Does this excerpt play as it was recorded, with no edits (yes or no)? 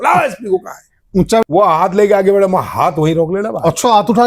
no